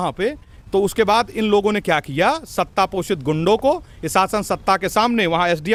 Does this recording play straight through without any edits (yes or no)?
yes